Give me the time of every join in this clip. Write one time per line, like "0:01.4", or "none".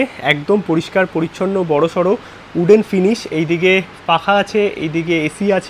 none